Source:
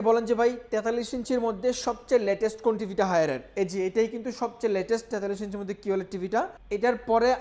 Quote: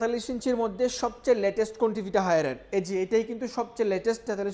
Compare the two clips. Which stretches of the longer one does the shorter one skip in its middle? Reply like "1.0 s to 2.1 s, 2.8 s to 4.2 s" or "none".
none